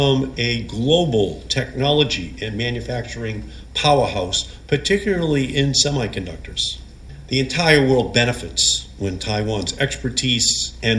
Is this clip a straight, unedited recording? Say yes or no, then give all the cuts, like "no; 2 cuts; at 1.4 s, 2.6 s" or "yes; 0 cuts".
no; 1 cut; at 7.1 s